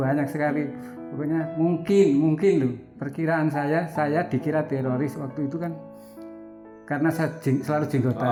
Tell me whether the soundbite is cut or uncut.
uncut